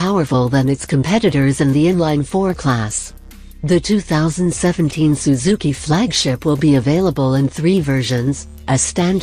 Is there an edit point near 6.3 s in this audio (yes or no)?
no